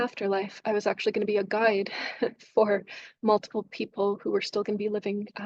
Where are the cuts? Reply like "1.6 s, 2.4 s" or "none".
none